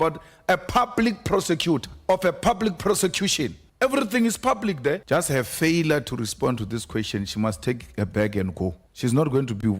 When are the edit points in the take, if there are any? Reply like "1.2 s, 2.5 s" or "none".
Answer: 1.9 s, 3.6 s, 5.0 s, 8.9 s